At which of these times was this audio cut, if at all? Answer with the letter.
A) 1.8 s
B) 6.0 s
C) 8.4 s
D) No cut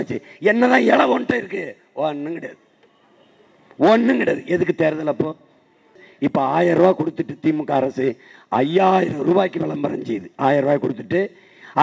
B